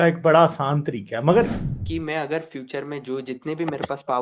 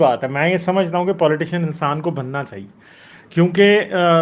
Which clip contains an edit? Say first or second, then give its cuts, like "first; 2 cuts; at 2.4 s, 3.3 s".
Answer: first; 1 cut; at 1.6 s